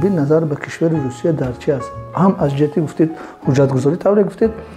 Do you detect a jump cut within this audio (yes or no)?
no